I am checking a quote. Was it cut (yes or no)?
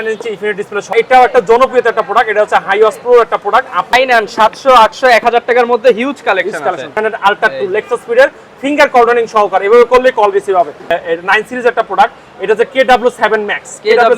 yes